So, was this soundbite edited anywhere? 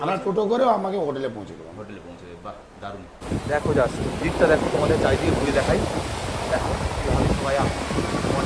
yes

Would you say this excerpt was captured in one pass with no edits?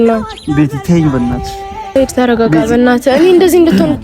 no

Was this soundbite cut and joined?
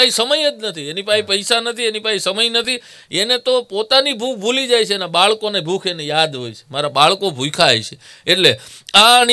no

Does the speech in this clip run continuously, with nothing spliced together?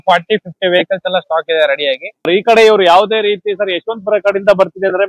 no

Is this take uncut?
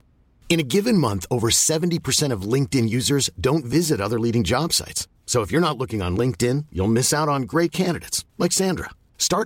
yes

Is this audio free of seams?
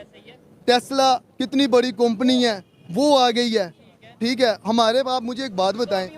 yes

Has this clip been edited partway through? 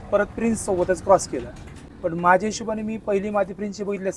no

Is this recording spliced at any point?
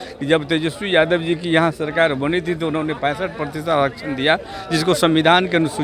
no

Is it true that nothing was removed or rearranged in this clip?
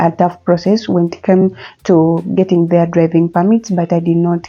yes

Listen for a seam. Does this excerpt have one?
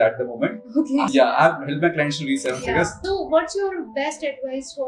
yes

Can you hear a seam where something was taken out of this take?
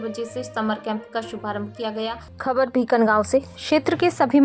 yes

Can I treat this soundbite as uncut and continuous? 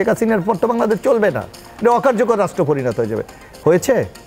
yes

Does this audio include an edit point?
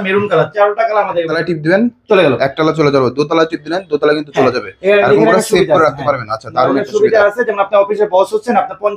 yes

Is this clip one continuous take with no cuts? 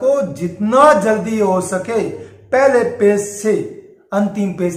yes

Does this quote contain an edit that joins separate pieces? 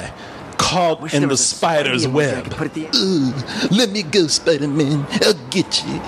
yes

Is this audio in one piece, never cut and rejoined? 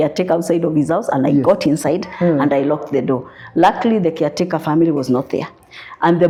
yes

